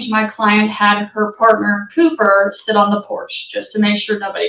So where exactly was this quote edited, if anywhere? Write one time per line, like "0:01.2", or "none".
none